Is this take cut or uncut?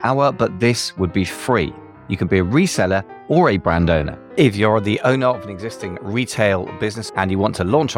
cut